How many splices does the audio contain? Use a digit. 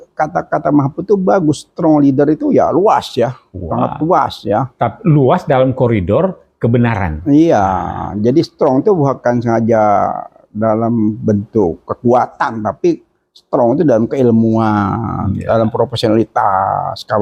0